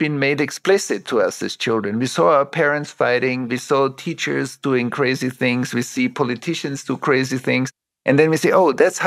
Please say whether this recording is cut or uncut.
cut